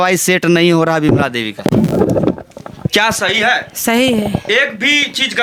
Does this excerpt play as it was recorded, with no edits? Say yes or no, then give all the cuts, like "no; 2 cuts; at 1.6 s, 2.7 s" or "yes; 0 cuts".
yes; 0 cuts